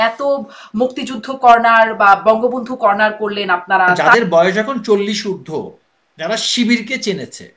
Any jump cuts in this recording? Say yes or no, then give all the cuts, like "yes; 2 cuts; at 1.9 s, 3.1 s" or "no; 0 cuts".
yes; 1 cut; at 4.0 s